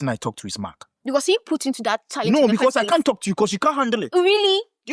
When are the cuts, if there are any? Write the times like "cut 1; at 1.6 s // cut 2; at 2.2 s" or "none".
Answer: none